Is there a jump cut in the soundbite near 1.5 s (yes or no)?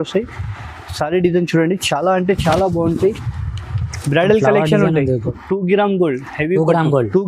no